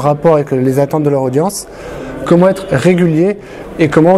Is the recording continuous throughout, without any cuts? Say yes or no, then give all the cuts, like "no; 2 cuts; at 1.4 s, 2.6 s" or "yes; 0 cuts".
yes; 0 cuts